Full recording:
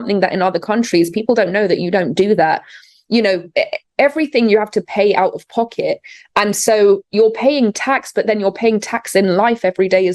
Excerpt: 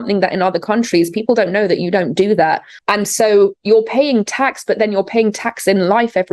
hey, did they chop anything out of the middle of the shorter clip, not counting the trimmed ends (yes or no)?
yes